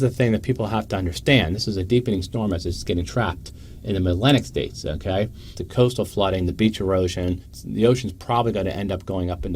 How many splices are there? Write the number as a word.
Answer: two